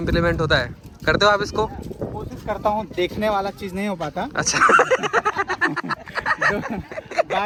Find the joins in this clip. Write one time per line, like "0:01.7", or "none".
none